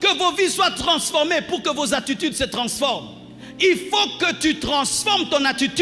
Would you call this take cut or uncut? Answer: uncut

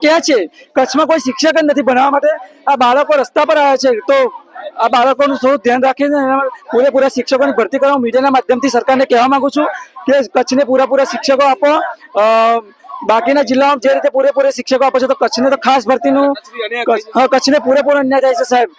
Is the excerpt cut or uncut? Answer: uncut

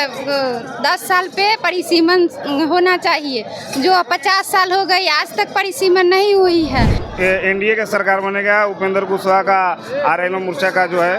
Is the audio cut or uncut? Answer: cut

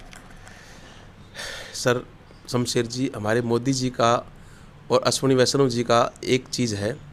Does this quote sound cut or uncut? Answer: uncut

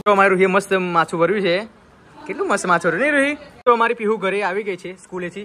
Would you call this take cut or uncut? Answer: cut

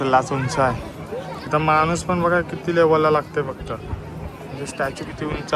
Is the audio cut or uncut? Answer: uncut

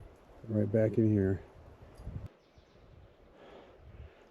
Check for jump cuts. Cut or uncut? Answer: cut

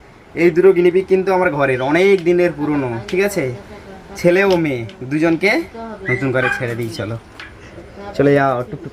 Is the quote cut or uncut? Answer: uncut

